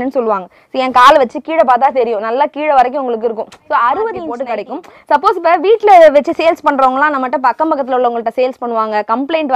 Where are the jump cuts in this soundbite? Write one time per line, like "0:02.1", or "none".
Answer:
0:04.4